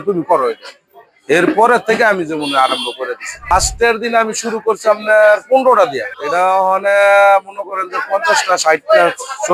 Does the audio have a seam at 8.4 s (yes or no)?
no